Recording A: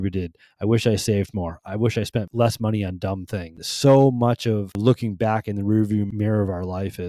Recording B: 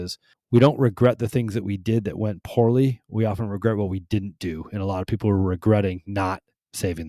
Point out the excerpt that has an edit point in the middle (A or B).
A